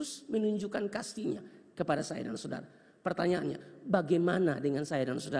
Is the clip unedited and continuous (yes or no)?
yes